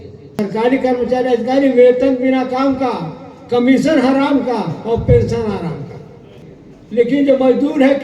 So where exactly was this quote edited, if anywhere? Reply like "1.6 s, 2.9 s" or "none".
none